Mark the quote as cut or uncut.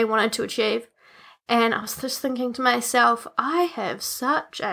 uncut